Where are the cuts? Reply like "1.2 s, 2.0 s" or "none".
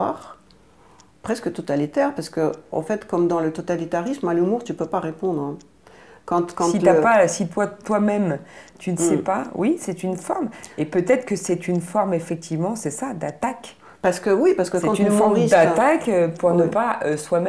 none